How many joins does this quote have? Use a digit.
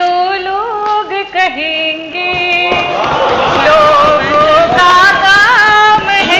0